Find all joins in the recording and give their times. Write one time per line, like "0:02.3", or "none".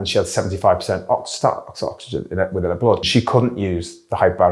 0:03.0